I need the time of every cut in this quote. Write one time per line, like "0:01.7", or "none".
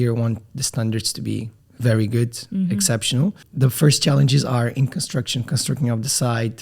0:01.6
0:03.4